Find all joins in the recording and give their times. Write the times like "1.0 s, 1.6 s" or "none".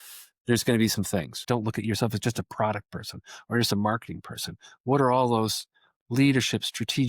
1.3 s